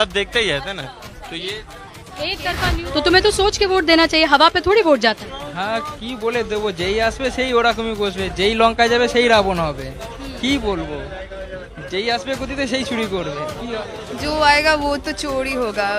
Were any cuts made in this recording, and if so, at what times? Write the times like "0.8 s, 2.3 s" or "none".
2.7 s